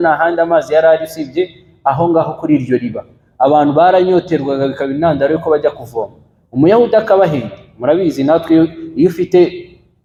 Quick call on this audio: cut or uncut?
uncut